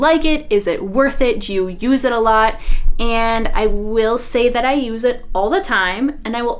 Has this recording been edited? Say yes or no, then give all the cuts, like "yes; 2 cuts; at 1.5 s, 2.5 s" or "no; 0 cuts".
no; 0 cuts